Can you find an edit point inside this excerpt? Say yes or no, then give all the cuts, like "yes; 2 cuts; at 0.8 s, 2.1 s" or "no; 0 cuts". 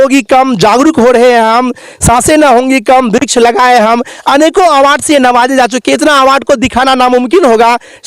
no; 0 cuts